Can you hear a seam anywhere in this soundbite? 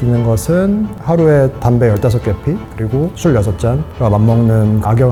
no; 0 cuts

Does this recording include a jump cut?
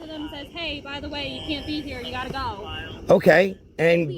no; 0 cuts

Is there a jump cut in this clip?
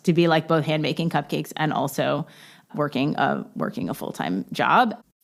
no; 0 cuts

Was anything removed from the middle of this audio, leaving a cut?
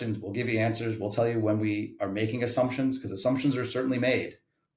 no; 0 cuts

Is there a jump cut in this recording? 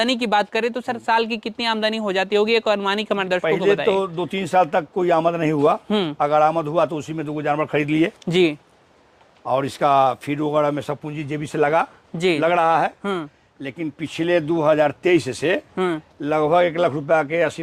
no; 0 cuts

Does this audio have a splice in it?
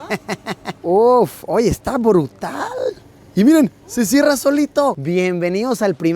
yes; 1 cut; at 5.0 s

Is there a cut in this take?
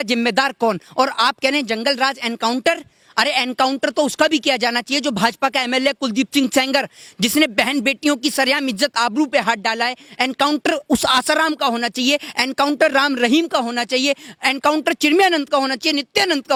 no; 0 cuts

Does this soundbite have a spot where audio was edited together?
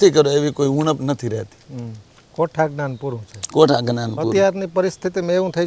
no; 0 cuts

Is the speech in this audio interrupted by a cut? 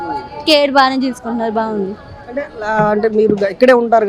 no; 0 cuts

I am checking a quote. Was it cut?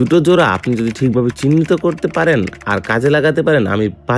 no; 0 cuts

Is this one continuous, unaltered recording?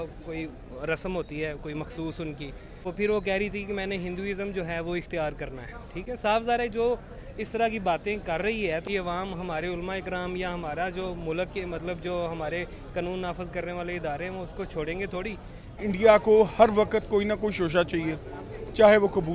no; 3 cuts; at 2.7 s, 8.8 s, 15.8 s

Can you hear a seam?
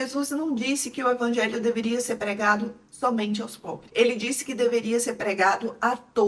no; 0 cuts

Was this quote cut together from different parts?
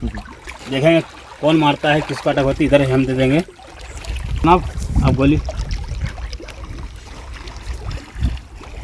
no; 0 cuts

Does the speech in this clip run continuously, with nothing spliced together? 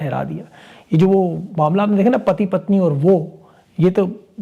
yes; 0 cuts

